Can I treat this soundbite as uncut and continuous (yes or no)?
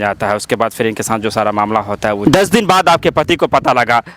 no